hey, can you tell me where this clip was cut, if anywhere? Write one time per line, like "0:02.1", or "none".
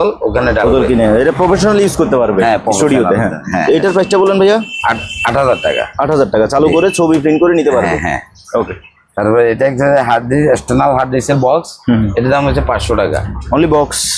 none